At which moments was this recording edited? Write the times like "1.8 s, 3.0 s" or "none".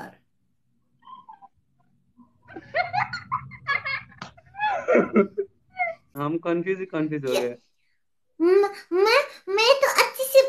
6.0 s